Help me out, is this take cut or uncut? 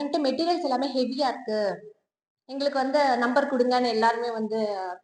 uncut